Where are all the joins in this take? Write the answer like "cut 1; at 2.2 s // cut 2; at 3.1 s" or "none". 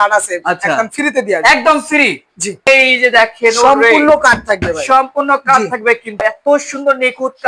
cut 1; at 2.7 s // cut 2; at 6.2 s